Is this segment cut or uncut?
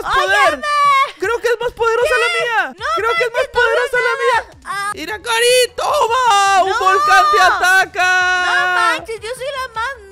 cut